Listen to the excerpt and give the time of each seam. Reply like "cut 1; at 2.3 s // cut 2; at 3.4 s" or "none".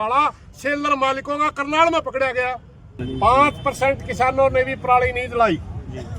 cut 1; at 3.0 s